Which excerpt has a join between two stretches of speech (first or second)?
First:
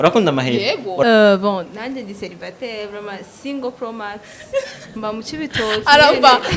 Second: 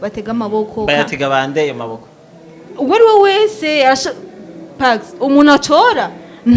first